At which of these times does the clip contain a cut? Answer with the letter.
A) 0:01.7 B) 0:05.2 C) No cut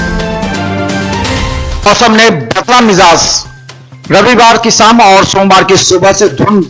A